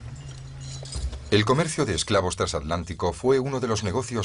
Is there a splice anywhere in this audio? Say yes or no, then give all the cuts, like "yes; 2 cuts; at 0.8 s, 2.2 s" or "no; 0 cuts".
no; 0 cuts